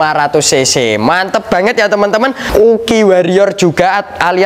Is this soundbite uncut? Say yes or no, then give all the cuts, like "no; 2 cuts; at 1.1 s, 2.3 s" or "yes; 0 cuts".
no; 1 cut; at 2.4 s